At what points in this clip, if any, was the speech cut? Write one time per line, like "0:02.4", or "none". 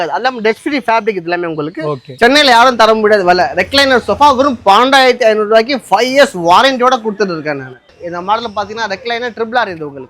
0:02.2
0:07.8